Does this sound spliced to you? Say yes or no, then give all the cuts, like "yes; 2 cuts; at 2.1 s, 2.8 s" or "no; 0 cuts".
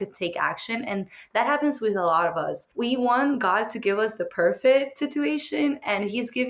yes; 1 cut; at 2.6 s